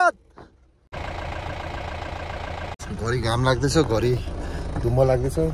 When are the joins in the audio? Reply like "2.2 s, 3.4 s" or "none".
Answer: 0.9 s, 2.8 s